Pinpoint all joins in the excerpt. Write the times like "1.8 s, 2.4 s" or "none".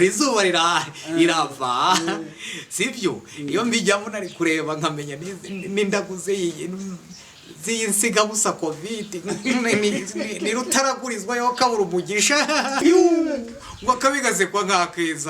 12.8 s